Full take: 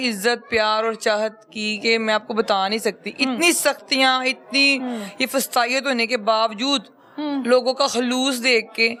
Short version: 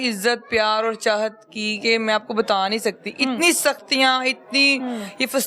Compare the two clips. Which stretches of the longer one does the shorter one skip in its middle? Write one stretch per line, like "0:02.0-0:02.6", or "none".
none

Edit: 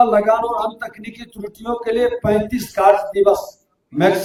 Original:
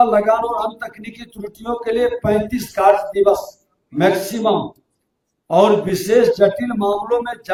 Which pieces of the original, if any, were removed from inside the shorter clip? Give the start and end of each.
none

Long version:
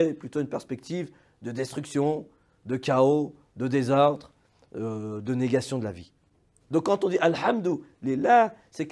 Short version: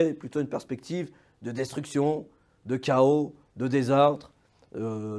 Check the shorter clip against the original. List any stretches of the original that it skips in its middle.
none

